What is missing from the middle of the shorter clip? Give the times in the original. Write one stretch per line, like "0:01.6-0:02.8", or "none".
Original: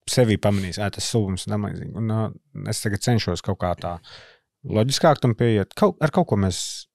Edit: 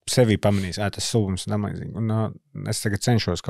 none